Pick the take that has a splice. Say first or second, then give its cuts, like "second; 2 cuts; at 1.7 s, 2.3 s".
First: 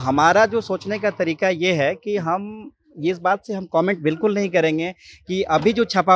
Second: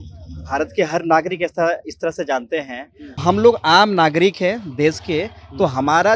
second; 1 cut; at 3.2 s